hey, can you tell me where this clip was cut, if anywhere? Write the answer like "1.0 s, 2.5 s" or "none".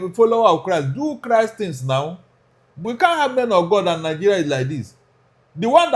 2.8 s